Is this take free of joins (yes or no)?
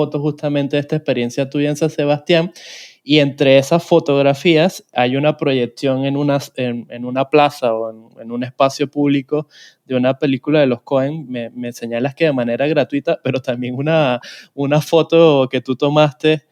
yes